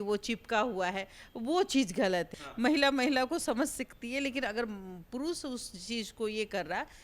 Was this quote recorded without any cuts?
no; 1 cut; at 2.4 s

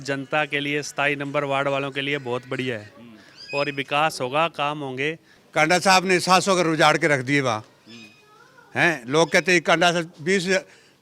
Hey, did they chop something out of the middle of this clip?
yes; 1 cut; at 5.3 s

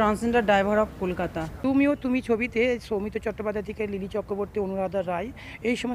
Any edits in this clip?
yes; 1 cut; at 1.5 s

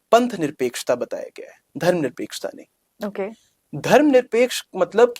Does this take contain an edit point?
no; 0 cuts

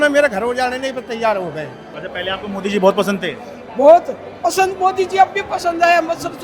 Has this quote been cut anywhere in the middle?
yes; 1 cut; at 1.8 s

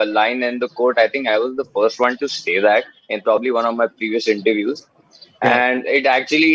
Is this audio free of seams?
yes; 0 cuts

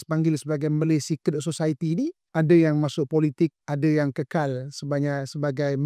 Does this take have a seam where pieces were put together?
yes; 2 cuts; at 2.2 s, 3.6 s

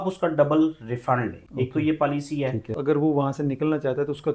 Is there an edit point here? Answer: yes; 2 cuts; at 1.4 s, 2.7 s

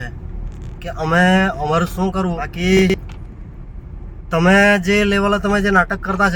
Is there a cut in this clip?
yes; 1 cut; at 2.7 s

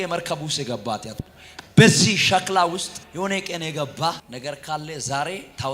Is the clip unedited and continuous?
no; 2 cuts; at 3.0 s, 4.3 s

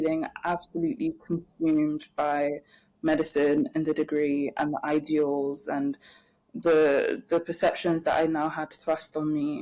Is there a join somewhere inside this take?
no; 0 cuts

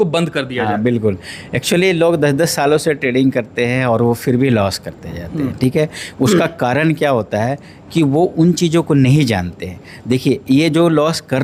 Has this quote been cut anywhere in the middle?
no; 0 cuts

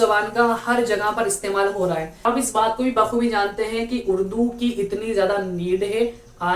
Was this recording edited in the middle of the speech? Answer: yes; 1 cut; at 2.3 s

